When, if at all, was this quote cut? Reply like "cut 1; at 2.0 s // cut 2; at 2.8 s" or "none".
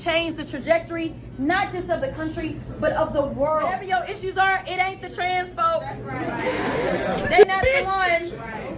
cut 1; at 3.8 s

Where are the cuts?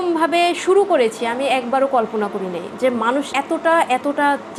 none

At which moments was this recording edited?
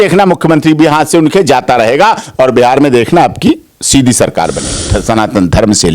cut 1; at 4.8 s

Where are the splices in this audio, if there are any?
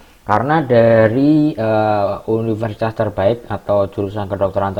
none

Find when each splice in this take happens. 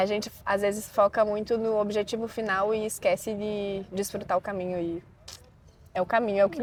none

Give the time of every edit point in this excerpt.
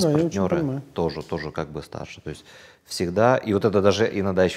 none

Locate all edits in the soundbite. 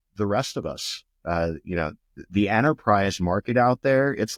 none

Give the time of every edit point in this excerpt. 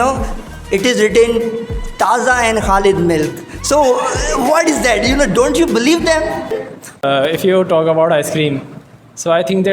cut 1; at 6.7 s

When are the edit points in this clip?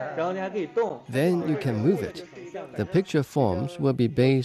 cut 1; at 1.0 s

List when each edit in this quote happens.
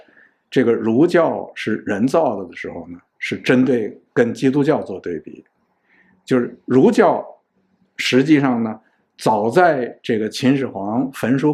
none

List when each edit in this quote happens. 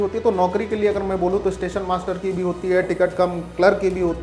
none

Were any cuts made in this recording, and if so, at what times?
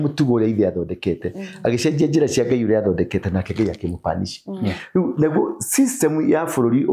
none

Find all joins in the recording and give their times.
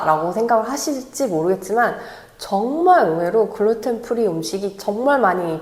none

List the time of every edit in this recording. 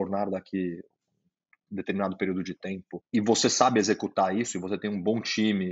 cut 1; at 2.9 s

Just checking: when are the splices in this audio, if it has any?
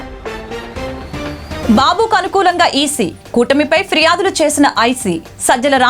cut 1; at 1.1 s

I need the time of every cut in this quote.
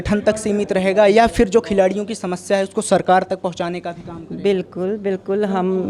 none

